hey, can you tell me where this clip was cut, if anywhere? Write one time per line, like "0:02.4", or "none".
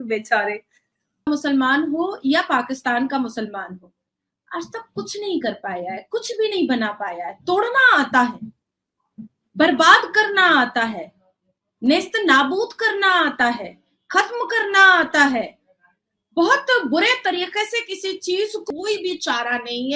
0:01.3
0:18.6